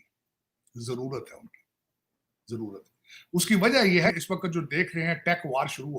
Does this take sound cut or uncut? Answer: cut